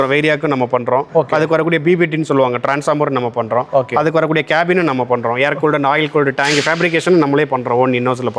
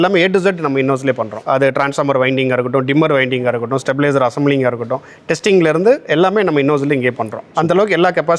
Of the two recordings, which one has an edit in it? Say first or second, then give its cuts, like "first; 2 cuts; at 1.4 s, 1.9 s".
second; 1 cut; at 1.3 s